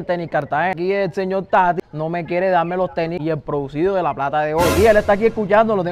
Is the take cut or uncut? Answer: cut